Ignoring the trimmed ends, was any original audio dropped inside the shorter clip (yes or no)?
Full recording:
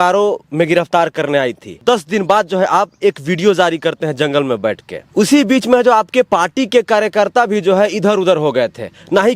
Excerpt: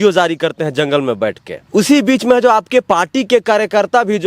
no